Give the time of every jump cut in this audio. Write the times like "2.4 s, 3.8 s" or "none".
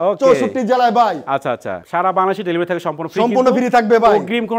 none